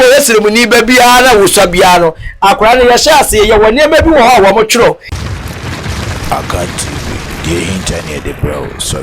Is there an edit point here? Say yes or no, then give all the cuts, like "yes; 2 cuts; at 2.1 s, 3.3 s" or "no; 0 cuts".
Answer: yes; 1 cut; at 5.1 s